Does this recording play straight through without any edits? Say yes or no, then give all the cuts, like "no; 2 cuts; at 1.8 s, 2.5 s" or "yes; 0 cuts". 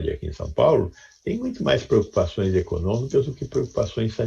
yes; 0 cuts